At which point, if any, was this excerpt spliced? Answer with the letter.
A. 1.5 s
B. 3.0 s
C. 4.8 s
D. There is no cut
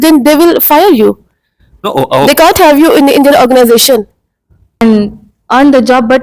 C